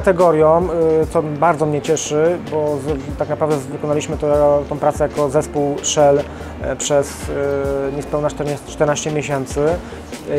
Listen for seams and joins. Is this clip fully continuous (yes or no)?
yes